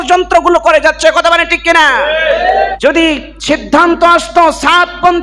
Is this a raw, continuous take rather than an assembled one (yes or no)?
no